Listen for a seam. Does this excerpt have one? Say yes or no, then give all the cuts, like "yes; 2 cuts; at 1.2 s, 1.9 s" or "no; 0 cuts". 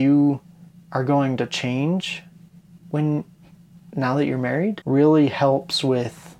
yes; 1 cut; at 4.8 s